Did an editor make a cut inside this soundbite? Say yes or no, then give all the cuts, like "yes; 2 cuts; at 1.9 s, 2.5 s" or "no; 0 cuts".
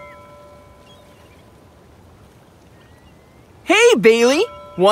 yes; 1 cut; at 3.7 s